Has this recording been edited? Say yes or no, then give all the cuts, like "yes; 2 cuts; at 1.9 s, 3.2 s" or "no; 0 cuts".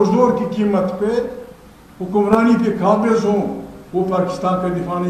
no; 0 cuts